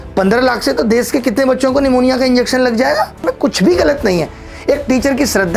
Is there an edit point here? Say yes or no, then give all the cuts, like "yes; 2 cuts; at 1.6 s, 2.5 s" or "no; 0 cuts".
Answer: yes; 1 cut; at 3.2 s